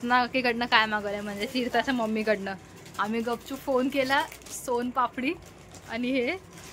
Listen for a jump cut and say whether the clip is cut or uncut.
uncut